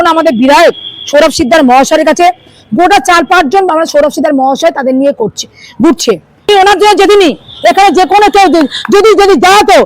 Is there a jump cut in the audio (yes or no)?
yes